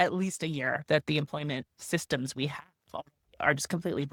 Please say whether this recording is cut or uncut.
uncut